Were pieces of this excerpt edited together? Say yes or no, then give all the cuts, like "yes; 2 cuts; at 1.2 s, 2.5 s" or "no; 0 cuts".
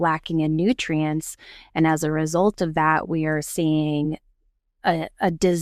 no; 0 cuts